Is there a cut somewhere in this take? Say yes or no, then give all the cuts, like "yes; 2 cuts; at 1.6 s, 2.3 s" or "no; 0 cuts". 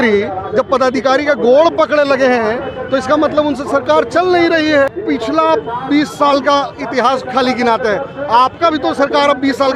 yes; 1 cut; at 5.0 s